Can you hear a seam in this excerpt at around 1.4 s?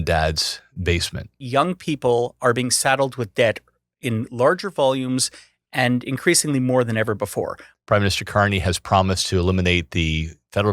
yes; 2 cuts; at 1.4 s, 7.6 s

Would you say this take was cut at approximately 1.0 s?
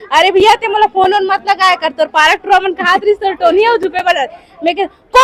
no; 0 cuts

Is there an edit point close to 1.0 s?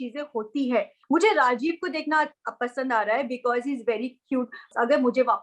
yes; 2 cuts; at 1.0 s, 4.6 s

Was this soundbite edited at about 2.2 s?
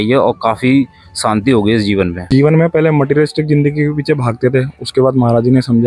yes; 1 cut; at 2.2 s

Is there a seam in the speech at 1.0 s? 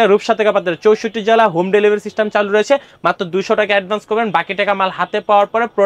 no; 0 cuts

